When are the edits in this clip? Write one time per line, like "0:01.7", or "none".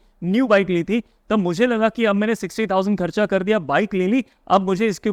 none